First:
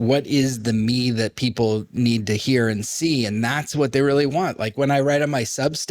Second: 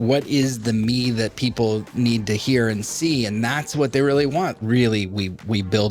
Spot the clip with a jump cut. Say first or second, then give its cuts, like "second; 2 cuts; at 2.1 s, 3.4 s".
second; 1 cut; at 4.6 s